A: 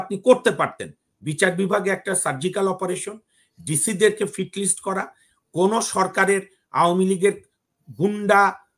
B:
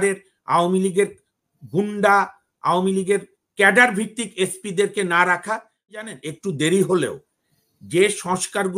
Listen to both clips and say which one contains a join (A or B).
B